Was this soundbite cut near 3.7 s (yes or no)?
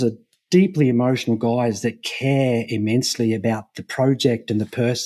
no